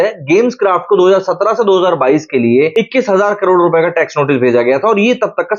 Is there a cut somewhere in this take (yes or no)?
no